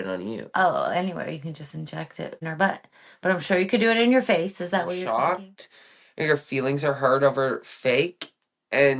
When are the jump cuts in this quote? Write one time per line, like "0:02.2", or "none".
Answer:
0:02.4
0:05.0